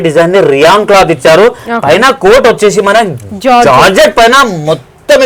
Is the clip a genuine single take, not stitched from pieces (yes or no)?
yes